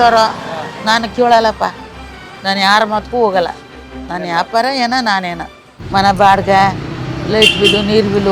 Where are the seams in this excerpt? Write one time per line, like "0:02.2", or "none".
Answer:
0:05.7